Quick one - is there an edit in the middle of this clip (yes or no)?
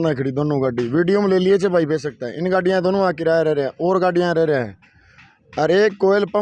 no